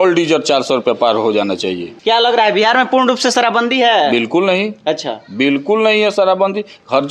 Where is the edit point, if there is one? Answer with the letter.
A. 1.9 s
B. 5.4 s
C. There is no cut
A